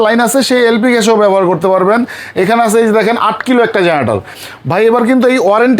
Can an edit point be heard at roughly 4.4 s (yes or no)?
yes